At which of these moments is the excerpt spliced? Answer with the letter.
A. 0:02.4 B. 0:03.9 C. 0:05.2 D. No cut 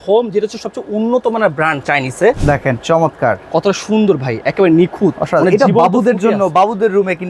A